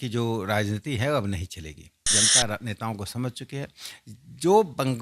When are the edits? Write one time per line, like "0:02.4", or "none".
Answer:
0:02.1